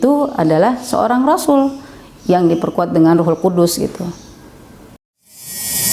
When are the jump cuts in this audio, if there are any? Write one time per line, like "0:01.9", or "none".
0:04.8

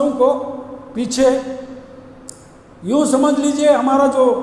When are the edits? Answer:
none

